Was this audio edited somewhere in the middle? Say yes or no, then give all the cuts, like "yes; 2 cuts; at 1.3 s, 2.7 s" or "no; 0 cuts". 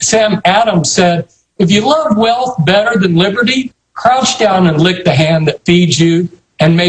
yes; 1 cut; at 5.4 s